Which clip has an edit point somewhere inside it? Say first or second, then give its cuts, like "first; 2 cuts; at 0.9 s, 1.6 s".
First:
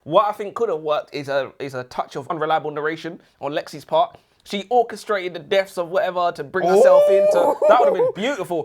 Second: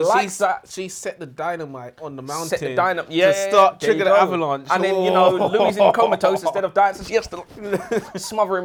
first; 1 cut; at 2.3 s